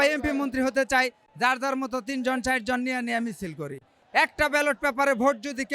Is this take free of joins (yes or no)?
no